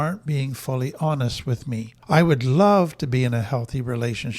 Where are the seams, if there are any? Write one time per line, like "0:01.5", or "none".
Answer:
0:01.9